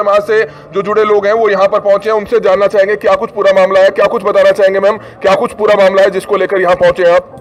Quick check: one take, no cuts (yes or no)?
yes